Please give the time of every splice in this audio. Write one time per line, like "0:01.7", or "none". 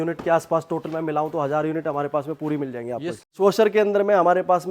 0:03.1